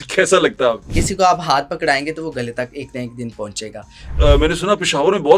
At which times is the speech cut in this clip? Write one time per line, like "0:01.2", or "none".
0:00.9
0:04.1